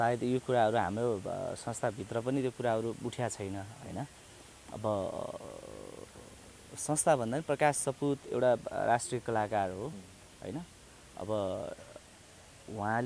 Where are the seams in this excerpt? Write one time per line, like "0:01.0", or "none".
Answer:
none